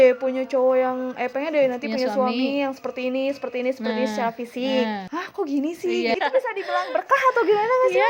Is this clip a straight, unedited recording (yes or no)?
no